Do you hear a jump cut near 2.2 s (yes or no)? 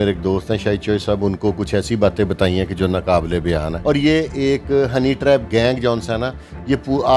no